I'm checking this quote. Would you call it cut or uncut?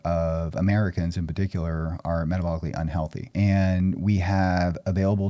cut